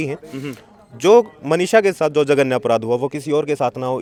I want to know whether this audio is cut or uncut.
uncut